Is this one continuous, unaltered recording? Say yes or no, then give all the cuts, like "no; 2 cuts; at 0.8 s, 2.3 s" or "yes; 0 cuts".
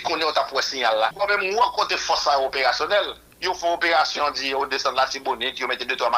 no; 1 cut; at 1.1 s